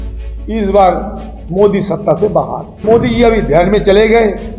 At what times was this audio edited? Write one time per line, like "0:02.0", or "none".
0:02.8